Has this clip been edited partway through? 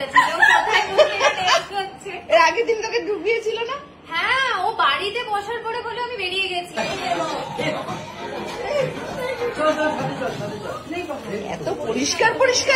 yes; 1 cut; at 6.7 s

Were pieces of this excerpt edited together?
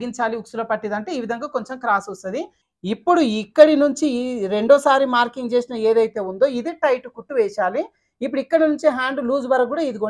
yes; 1 cut; at 2.6 s

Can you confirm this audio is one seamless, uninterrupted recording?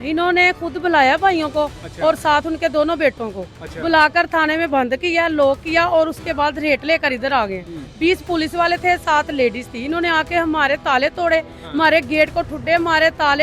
yes; 0 cuts

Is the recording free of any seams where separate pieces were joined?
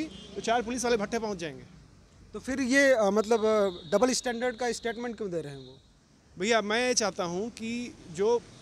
yes; 0 cuts

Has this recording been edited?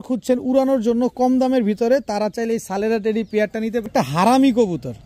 yes; 1 cut; at 3.9 s

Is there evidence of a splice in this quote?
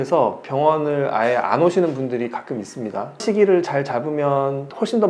yes; 1 cut; at 3.1 s

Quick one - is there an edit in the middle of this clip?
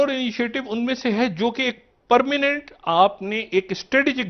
no; 0 cuts

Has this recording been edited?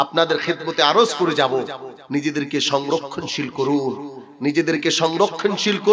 no; 0 cuts

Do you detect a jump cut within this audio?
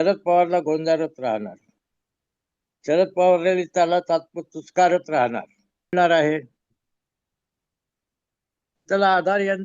yes; 1 cut; at 5.9 s

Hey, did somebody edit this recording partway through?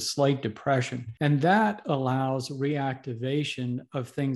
yes; 1 cut; at 1.0 s

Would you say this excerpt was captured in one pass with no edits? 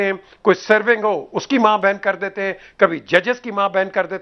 yes; 0 cuts

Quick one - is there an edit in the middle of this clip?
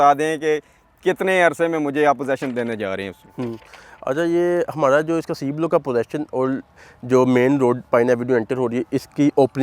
no; 0 cuts

